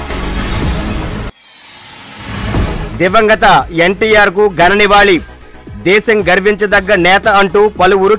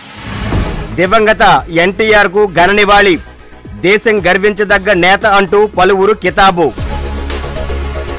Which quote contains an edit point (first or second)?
first